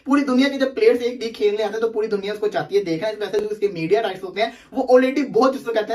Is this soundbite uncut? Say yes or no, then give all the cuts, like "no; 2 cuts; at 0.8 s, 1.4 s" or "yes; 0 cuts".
yes; 0 cuts